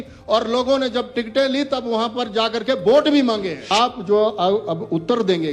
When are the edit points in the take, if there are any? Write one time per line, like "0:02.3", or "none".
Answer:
0:03.6